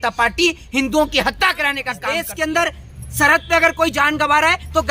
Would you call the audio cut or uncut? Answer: cut